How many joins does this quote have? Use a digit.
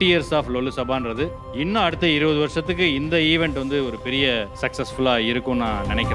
2